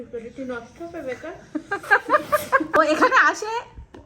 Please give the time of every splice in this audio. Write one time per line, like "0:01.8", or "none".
0:02.8

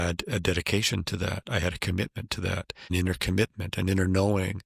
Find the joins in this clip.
none

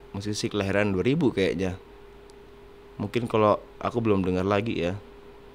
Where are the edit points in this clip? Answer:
none

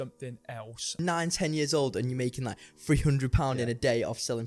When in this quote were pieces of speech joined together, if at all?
0:00.9

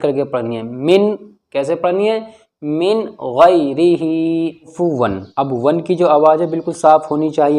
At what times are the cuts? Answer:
0:04.7

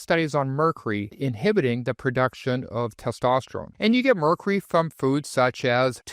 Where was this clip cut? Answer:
0:03.7

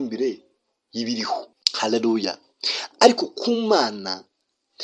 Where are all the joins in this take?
0:01.6

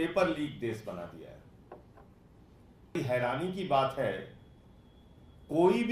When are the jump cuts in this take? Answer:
0:02.9

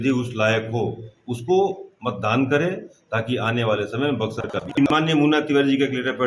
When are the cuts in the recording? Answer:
0:04.9

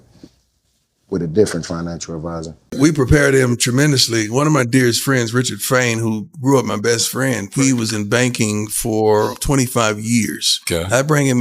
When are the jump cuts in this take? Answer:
0:02.7

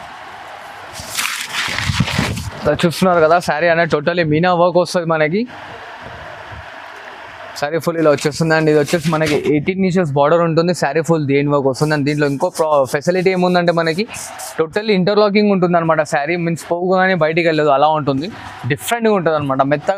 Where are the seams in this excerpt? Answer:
none

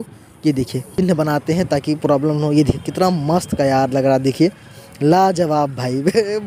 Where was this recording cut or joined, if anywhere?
0:00.9

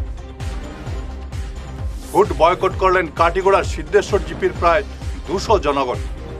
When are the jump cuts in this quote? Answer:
0:01.0

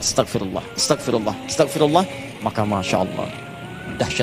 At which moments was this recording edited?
none

